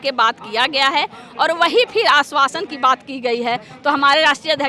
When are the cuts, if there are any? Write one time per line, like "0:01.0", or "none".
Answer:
none